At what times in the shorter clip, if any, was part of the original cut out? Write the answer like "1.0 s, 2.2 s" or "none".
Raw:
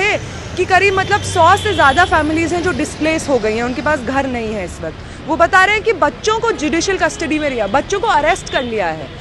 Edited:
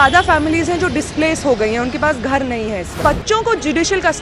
3.0 s